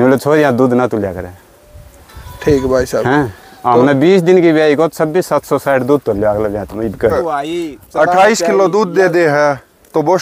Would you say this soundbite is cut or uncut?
cut